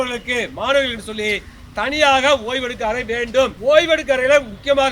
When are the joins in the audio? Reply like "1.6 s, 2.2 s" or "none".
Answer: 3.6 s